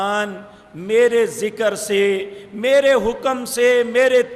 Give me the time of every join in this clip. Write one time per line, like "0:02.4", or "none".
none